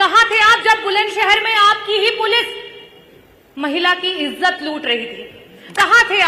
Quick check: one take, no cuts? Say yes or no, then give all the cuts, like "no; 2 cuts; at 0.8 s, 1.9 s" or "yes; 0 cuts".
yes; 0 cuts